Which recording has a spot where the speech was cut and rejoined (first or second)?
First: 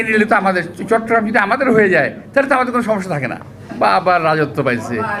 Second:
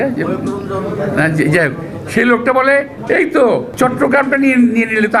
second